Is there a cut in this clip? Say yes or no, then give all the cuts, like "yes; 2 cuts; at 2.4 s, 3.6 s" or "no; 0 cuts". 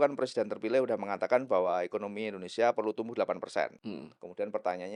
no; 0 cuts